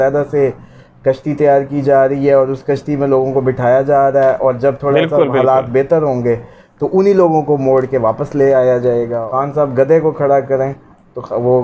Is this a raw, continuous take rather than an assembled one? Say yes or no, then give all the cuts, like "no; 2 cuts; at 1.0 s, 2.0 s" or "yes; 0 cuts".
no; 1 cut; at 9.2 s